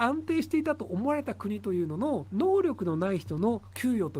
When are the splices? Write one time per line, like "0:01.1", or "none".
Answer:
0:02.3